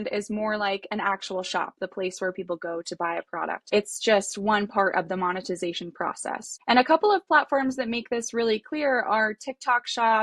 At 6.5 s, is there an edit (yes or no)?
yes